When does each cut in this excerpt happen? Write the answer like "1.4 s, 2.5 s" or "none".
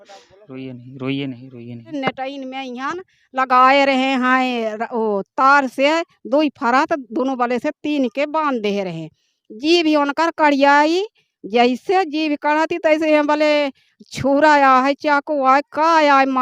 1.9 s